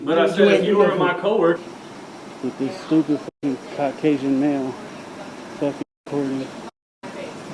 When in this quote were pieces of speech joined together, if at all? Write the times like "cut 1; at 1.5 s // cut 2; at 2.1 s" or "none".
cut 1; at 1.6 s

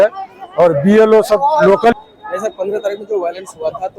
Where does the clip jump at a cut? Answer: cut 1; at 1.9 s

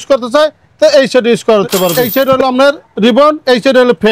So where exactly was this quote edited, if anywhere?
cut 1; at 2.1 s

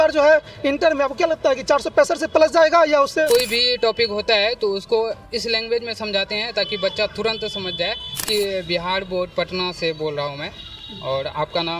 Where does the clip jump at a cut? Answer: cut 1; at 3.3 s // cut 2; at 8.3 s

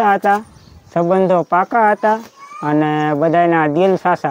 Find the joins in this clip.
none

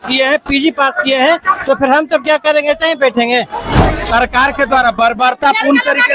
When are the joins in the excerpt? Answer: cut 1; at 3.7 s

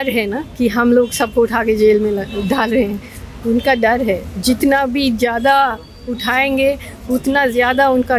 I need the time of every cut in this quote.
none

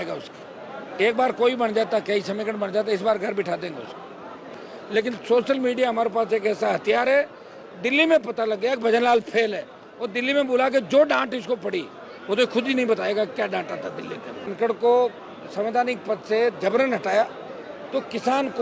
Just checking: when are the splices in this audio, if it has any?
cut 1; at 4.6 s // cut 2; at 14.5 s

